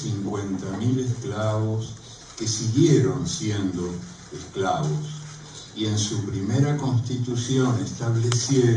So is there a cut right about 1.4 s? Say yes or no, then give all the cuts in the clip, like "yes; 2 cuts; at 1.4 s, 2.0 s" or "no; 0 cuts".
yes; 1 cut; at 1.4 s